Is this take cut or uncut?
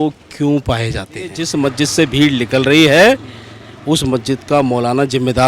cut